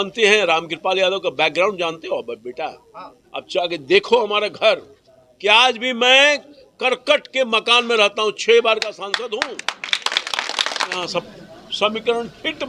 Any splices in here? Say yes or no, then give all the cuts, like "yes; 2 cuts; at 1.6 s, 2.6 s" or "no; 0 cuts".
yes; 1 cut; at 11.0 s